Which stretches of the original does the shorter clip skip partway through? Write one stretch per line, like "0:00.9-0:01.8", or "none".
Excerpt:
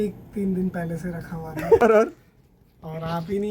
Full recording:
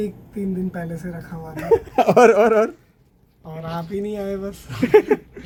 0:01.8-0:02.4